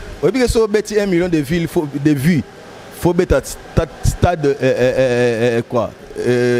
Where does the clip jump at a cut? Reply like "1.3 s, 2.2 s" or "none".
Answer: none